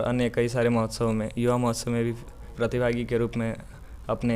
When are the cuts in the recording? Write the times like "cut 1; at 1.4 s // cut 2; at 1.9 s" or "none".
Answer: cut 1; at 2.5 s